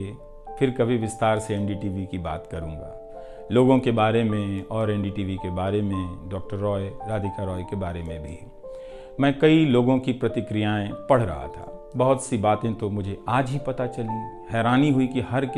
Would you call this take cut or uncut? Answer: uncut